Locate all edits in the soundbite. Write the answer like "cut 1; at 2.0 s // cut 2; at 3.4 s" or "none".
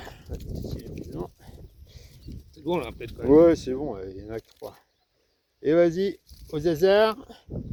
none